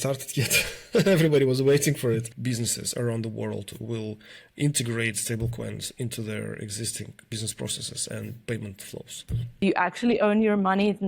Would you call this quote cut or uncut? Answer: cut